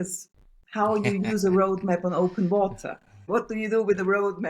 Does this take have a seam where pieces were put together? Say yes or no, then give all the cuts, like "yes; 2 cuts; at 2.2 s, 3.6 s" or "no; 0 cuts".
yes; 1 cut; at 3.2 s